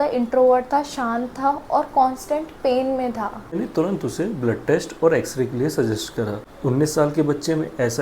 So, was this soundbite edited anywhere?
yes; 2 cuts; at 3.5 s, 6.4 s

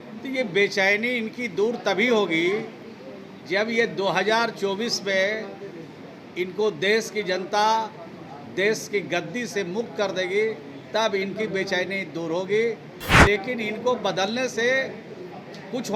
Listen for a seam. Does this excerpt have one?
no; 0 cuts

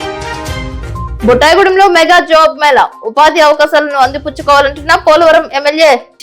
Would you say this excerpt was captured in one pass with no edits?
no; 1 cut; at 1.1 s

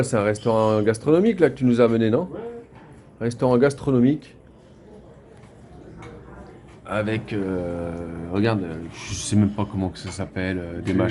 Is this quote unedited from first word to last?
yes; 0 cuts

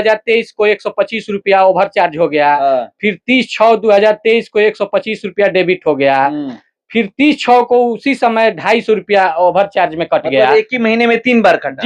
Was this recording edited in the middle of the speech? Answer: no; 0 cuts

